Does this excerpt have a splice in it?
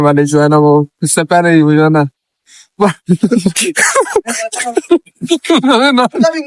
no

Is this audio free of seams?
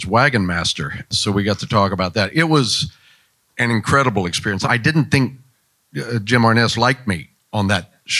no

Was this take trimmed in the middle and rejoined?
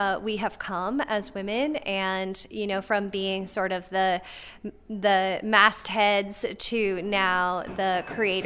no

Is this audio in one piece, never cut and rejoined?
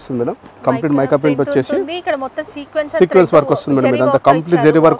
yes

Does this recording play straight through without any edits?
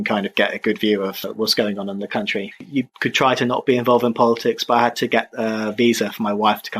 no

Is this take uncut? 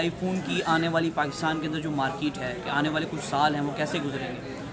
yes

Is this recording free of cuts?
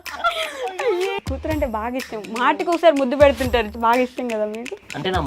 no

